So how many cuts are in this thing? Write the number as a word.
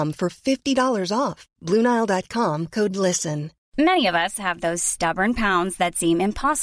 one